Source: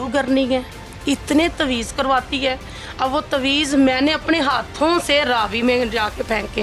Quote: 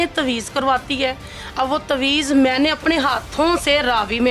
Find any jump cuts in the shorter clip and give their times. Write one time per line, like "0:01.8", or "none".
none

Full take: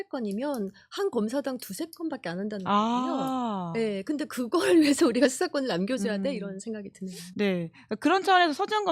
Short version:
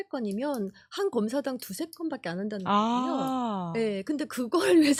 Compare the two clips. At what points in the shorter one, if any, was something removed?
none

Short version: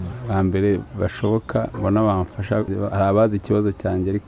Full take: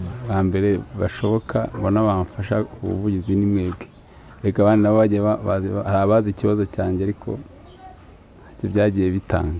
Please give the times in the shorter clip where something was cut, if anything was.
0:02.7

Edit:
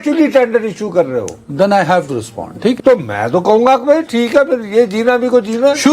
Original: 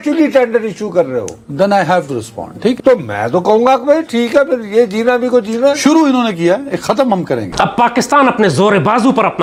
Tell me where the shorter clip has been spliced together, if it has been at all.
none

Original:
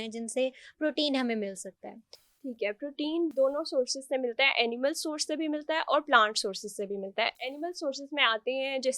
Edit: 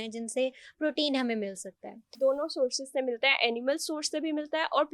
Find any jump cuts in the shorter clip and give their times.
0:02.2

